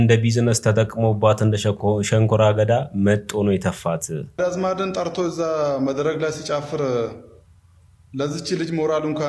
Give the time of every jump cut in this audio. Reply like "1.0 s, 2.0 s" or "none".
4.4 s